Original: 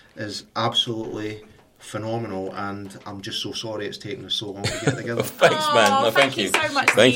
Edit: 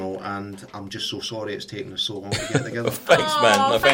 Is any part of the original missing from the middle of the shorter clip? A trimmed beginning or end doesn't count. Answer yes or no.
no